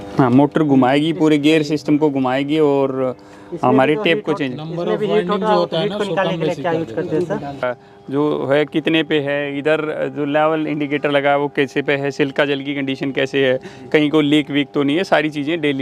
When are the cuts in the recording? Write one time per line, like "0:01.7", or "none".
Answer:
0:07.5